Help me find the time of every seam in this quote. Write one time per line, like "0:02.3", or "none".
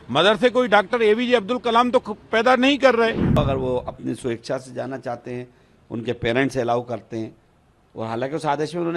0:03.4

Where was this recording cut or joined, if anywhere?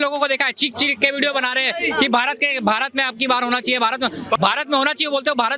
0:04.4

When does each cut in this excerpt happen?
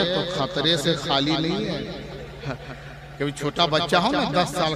none

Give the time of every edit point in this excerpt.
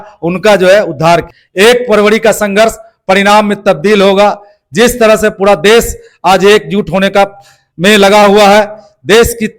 0:01.4

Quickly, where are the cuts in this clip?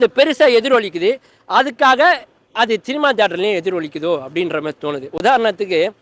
none

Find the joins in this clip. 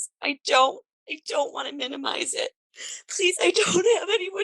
0:02.7

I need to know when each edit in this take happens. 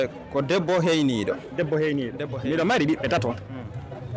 0:02.2

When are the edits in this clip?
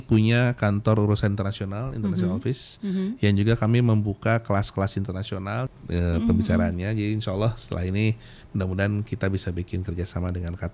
0:05.6

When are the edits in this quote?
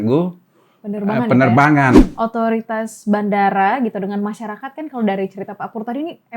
0:01.9

